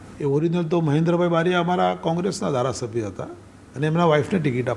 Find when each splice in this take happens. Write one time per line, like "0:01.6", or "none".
none